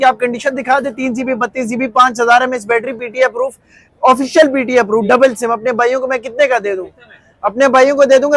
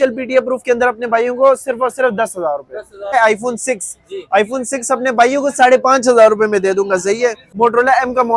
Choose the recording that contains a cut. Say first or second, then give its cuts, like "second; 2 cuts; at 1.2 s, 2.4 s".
second; 2 cuts; at 3.1 s, 7.4 s